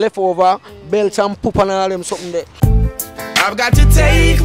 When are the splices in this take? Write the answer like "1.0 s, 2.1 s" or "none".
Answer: 2.6 s